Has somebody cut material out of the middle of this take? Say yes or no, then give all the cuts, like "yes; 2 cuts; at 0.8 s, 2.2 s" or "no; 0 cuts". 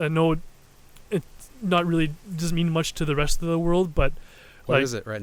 no; 0 cuts